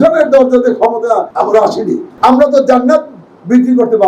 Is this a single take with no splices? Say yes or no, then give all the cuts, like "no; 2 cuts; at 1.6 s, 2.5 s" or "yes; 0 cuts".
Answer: no; 2 cuts; at 1.3 s, 2.1 s